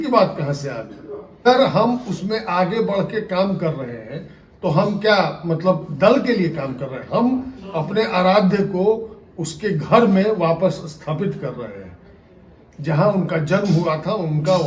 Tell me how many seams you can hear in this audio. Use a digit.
1